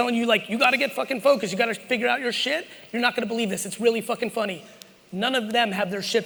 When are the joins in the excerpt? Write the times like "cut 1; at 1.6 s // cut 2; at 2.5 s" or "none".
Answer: none